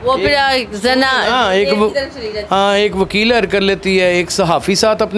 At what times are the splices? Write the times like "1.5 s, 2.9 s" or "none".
none